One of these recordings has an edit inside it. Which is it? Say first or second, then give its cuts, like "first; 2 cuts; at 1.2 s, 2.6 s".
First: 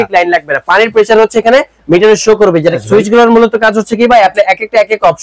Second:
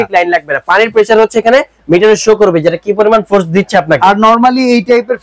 first; 1 cut; at 2.8 s